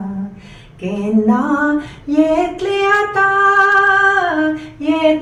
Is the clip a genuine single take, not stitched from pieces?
yes; 0 cuts

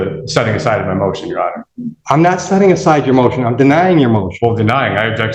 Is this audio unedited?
yes; 0 cuts

